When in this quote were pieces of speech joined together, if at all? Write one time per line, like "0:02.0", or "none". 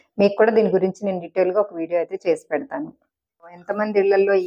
0:03.6